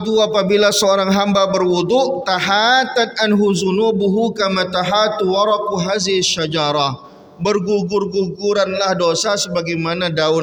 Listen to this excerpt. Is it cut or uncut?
uncut